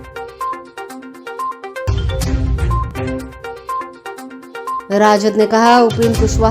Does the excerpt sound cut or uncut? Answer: cut